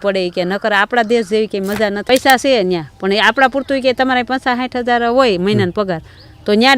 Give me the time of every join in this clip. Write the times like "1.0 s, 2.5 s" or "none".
2.0 s